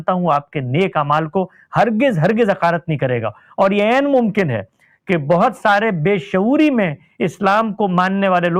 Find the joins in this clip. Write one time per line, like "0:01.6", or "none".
none

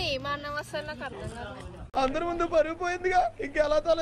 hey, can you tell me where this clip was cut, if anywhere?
0:01.8

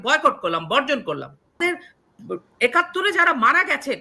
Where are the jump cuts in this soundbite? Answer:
0:01.6

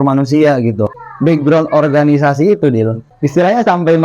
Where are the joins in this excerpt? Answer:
0:01.0

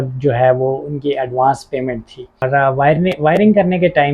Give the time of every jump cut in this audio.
0:02.5

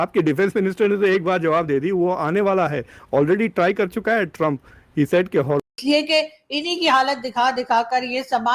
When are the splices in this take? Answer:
0:05.6

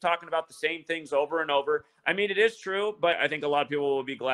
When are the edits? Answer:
0:03.2

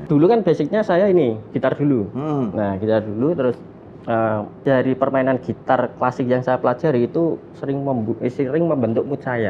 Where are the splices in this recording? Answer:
0:04.5

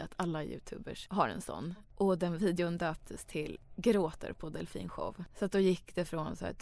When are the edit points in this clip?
0:00.9
0:01.7
0:03.6
0:05.2

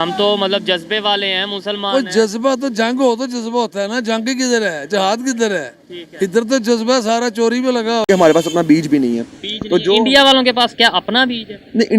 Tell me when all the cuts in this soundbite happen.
0:08.1

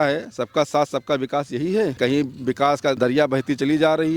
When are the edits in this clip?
0:01.9
0:03.0

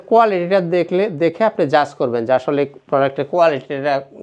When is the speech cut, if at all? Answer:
none

